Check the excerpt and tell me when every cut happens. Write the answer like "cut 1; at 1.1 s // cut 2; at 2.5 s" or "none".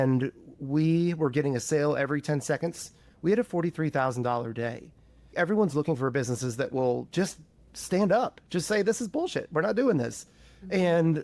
cut 1; at 3.0 s // cut 2; at 5.3 s